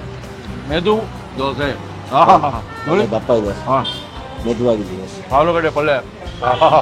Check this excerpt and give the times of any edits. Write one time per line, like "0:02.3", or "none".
none